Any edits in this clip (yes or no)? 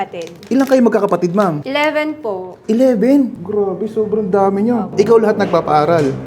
yes